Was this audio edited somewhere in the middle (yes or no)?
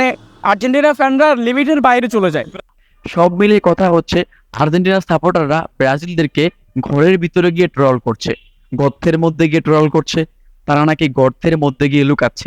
yes